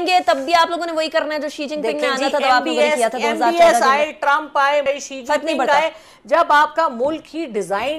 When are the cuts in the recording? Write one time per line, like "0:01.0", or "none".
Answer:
none